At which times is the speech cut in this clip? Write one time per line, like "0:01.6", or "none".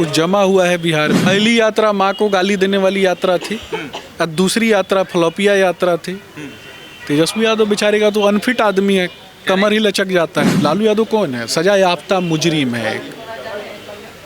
0:01.3
0:10.5